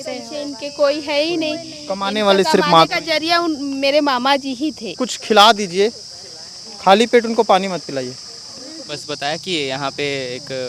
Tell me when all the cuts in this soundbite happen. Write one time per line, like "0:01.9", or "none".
0:05.1
0:09.0